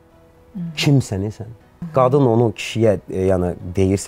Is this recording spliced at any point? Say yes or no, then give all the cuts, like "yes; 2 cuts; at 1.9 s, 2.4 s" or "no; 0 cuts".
yes; 1 cut; at 1.7 s